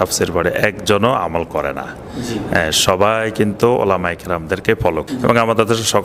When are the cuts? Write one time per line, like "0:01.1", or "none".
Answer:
0:04.8